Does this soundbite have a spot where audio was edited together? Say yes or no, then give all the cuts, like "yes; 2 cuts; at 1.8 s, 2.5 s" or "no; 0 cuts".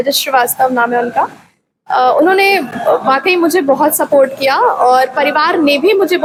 no; 0 cuts